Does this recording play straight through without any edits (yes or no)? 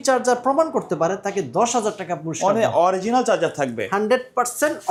yes